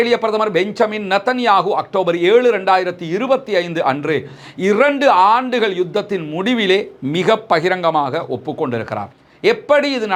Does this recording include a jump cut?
no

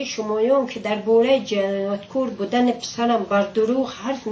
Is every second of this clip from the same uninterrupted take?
yes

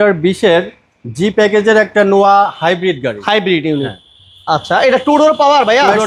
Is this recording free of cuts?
yes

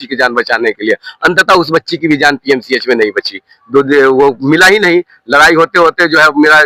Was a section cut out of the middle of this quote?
no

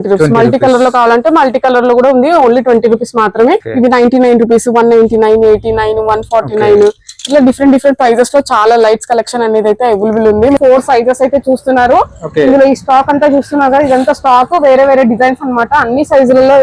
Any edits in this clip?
yes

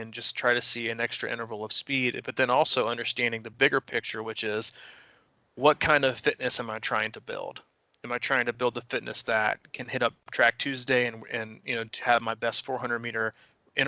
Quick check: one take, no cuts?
yes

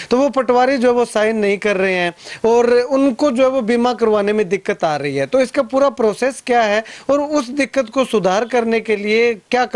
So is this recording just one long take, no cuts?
yes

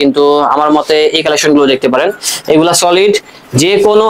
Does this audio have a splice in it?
no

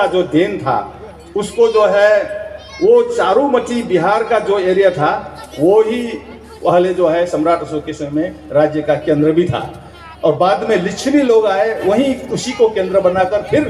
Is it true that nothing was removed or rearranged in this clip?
yes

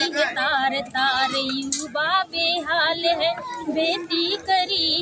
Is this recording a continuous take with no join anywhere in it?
yes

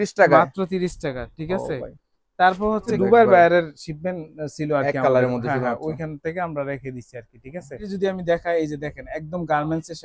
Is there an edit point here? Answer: yes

